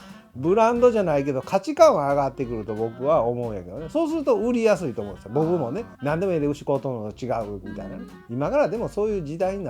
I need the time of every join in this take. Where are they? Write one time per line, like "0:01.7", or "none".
0:05.9

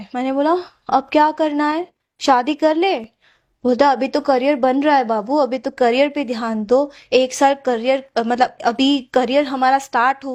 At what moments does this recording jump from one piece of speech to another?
none

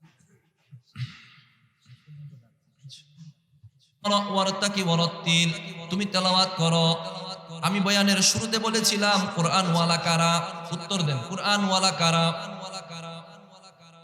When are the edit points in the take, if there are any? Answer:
0:04.1

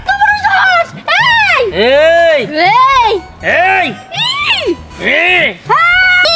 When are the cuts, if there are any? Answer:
none

